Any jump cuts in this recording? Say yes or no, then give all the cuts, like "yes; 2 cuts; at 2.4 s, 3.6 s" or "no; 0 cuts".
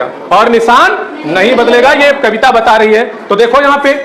no; 0 cuts